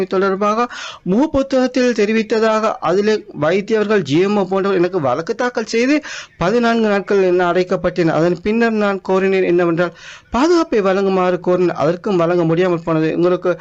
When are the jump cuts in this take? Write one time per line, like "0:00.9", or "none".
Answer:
none